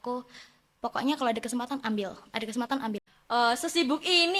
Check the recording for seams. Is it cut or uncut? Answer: cut